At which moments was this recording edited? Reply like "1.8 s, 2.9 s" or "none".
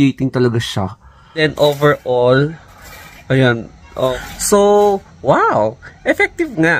1.4 s, 4.1 s